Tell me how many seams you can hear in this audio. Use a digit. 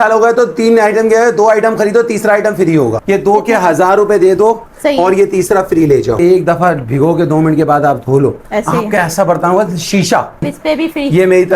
3